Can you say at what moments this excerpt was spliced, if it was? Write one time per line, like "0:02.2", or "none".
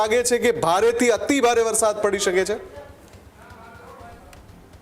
none